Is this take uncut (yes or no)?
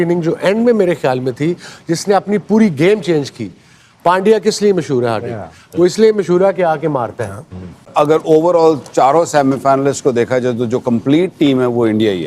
no